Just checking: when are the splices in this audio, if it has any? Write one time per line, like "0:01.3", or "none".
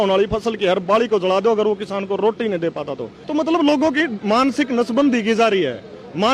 0:03.2